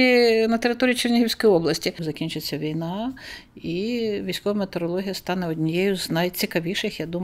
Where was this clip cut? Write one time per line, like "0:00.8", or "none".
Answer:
0:02.1